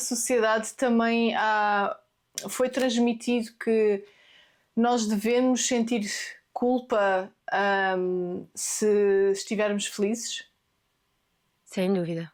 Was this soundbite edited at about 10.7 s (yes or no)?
no